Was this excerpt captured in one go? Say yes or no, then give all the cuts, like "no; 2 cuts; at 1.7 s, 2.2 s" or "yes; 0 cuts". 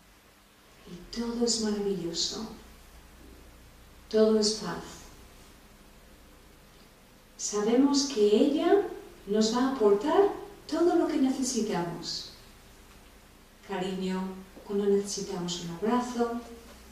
yes; 0 cuts